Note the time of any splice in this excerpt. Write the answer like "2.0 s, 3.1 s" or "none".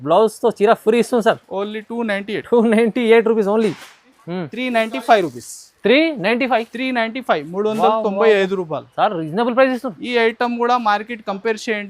4.2 s